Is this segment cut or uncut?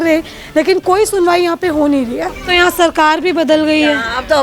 cut